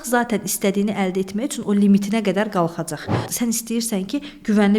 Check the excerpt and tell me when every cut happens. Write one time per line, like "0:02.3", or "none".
0:03.2